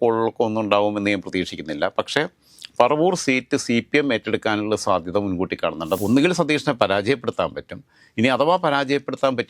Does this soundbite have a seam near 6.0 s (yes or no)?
yes